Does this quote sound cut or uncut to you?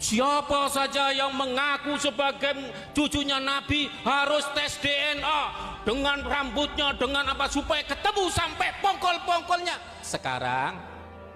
uncut